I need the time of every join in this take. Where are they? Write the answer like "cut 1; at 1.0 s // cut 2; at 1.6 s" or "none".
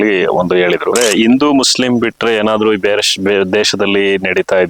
cut 1; at 1.0 s